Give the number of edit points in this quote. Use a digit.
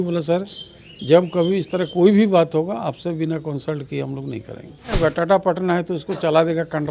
1